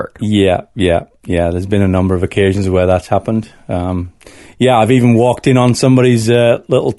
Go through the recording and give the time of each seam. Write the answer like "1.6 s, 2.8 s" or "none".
none

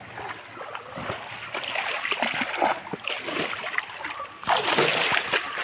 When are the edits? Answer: none

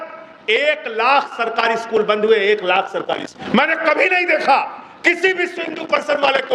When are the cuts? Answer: 3.3 s

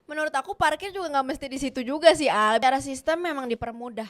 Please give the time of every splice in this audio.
2.6 s

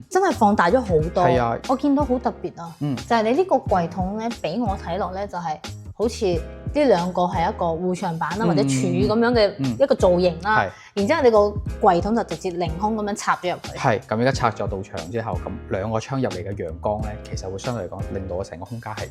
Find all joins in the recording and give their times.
1.6 s, 14.0 s

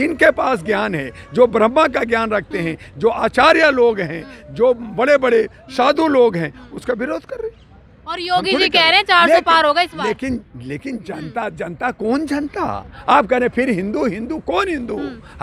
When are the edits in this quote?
none

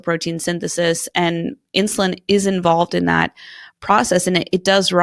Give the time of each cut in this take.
none

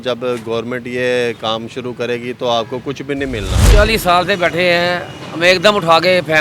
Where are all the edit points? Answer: 3.6 s

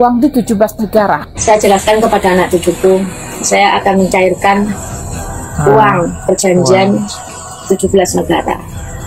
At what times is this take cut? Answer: 1.3 s

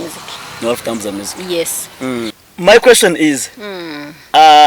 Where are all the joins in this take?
2.4 s

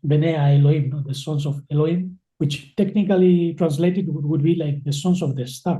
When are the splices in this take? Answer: 2.2 s

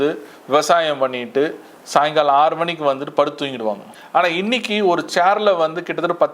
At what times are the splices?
3.9 s

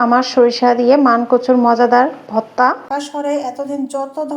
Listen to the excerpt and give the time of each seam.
2.6 s

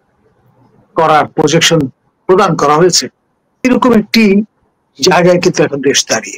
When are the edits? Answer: 3.6 s

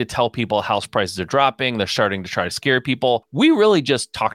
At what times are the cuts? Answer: 3.3 s

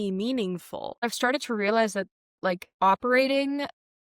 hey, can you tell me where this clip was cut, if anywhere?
1.0 s, 2.7 s

